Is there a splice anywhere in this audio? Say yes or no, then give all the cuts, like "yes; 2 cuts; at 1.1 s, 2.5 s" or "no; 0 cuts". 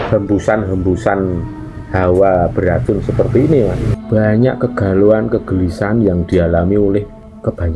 yes; 1 cut; at 3.9 s